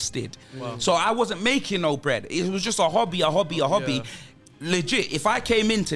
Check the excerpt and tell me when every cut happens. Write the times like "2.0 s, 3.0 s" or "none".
none